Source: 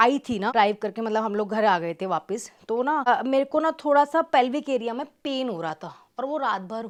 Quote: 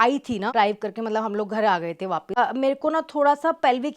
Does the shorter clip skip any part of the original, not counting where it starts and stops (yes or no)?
yes